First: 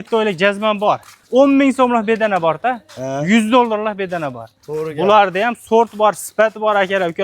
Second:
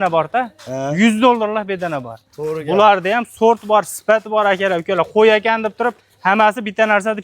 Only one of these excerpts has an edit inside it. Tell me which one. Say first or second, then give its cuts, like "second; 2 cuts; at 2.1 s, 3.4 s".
first; 1 cut; at 1.2 s